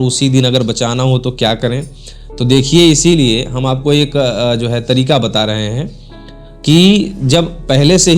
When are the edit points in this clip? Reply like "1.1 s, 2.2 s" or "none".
none